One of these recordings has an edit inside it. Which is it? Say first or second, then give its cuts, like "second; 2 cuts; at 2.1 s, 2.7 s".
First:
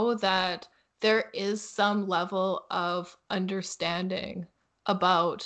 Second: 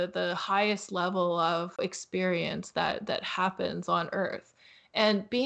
second; 1 cut; at 1.8 s